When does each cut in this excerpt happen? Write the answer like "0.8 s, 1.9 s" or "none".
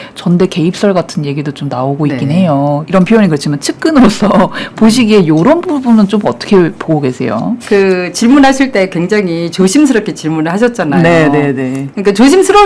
none